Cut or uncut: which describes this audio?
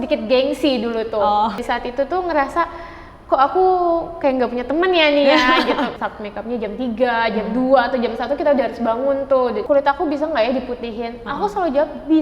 cut